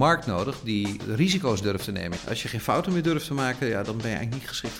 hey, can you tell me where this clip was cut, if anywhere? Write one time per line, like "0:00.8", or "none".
0:01.0
0:02.1